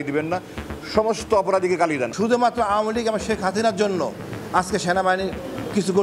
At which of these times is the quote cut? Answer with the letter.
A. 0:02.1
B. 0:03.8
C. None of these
A